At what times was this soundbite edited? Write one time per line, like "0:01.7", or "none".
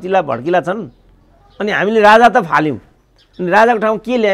none